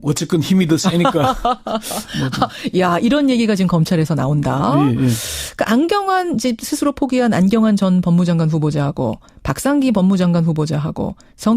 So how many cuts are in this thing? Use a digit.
1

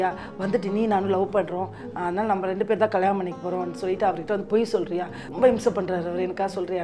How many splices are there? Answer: 1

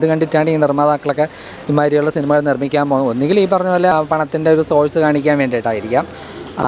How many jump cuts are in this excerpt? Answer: 0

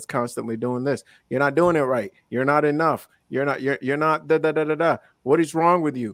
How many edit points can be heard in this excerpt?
0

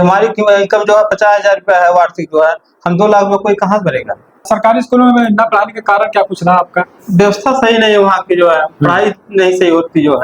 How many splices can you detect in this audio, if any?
1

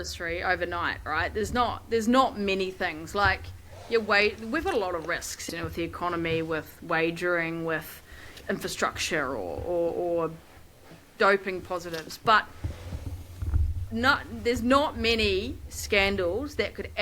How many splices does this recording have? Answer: 3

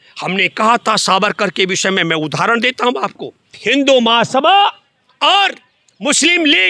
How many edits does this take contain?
1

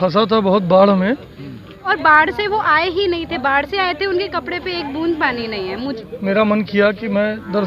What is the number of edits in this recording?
2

